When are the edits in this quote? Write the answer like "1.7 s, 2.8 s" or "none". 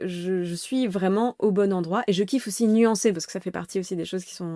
none